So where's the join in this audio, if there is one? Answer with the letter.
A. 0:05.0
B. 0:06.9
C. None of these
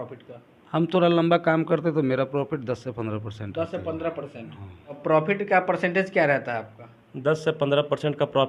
A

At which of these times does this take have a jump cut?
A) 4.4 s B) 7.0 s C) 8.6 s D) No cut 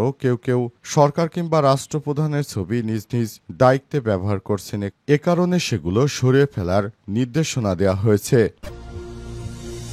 C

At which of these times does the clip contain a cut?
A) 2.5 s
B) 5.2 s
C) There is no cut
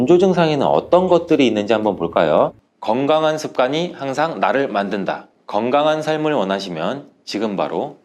A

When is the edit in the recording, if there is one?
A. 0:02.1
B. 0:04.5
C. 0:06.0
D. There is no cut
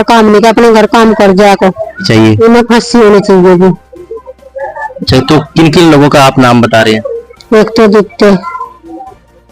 A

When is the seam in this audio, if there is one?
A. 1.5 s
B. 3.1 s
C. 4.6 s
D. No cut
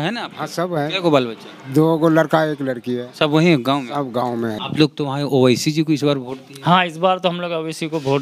C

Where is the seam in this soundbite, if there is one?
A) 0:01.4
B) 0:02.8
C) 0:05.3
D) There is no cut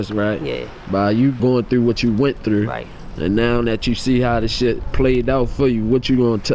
A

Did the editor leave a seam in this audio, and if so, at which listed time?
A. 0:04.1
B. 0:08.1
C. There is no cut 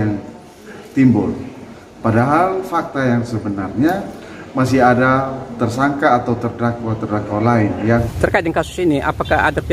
B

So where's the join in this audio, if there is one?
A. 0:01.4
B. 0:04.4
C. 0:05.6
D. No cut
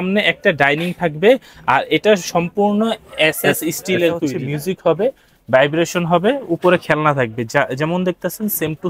B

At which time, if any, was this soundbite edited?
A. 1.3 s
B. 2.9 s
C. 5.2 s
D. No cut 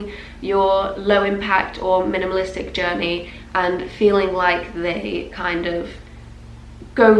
D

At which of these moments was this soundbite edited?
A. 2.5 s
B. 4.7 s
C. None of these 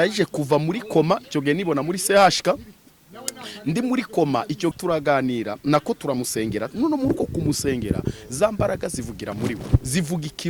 B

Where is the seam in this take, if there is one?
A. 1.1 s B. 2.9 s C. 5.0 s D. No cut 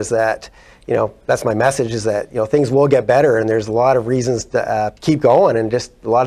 C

